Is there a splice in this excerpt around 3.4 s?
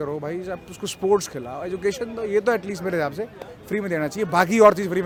no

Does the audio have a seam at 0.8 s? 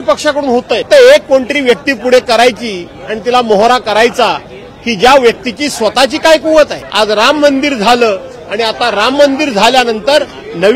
yes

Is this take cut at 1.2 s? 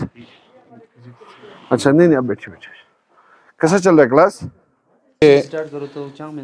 no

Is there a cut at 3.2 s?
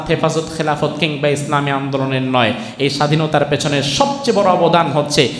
no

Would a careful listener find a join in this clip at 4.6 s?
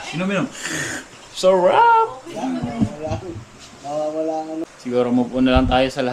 yes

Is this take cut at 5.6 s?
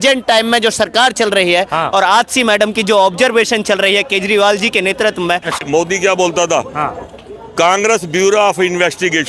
yes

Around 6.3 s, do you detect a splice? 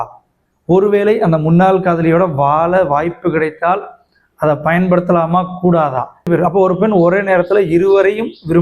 yes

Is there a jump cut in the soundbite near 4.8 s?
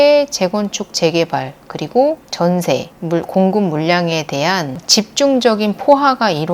yes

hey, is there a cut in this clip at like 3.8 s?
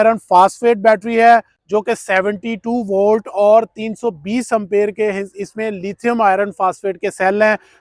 no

